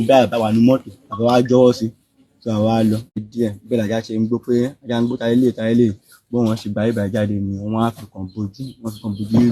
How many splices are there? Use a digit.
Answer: 1